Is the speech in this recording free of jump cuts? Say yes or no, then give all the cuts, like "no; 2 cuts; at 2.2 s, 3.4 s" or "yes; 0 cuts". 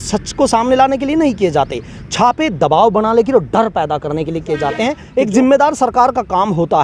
no; 1 cut; at 5.0 s